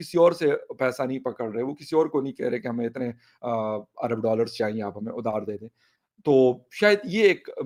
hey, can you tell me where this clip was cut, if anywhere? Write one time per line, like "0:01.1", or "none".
none